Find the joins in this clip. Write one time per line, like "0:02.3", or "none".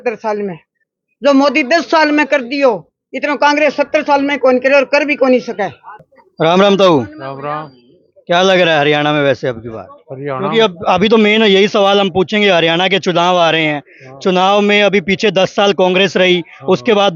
none